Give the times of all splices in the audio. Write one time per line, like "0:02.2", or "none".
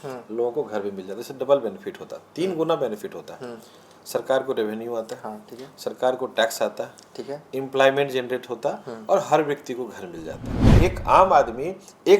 0:10.6